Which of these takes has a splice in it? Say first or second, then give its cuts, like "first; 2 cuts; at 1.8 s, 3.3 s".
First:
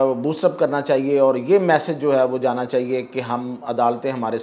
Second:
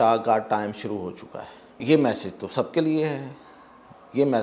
second; 1 cut; at 1.8 s